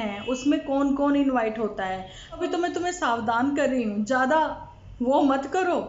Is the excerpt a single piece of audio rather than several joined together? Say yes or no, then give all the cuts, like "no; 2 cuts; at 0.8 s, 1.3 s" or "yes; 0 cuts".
no; 1 cut; at 2.4 s